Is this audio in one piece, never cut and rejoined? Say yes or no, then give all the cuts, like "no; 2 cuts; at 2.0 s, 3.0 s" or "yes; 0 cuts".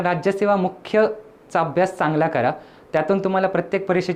yes; 0 cuts